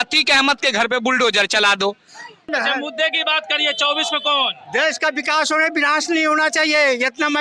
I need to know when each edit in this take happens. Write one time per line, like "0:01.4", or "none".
0:02.4